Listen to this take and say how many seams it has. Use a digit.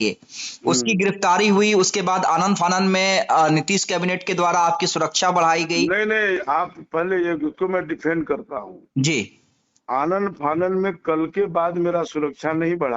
0